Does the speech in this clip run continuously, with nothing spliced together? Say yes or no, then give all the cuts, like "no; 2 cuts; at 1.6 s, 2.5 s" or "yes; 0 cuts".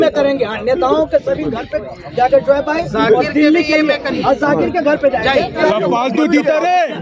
no; 1 cut; at 5.6 s